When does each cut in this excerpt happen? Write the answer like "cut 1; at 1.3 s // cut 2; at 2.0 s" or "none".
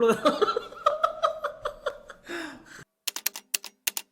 cut 1; at 2.6 s